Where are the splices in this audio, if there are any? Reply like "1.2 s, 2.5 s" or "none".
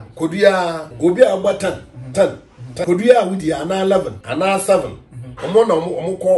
0.9 s, 2.8 s, 4.2 s